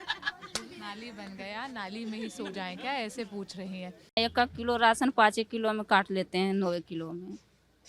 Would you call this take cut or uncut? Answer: cut